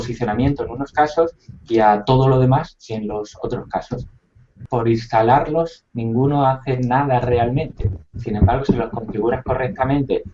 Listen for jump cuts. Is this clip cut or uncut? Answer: cut